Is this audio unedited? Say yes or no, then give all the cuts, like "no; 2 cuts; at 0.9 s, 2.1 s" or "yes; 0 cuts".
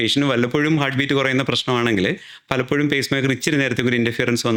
yes; 0 cuts